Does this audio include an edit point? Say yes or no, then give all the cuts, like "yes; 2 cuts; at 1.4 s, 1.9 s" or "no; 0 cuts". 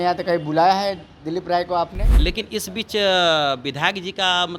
yes; 1 cut; at 2.0 s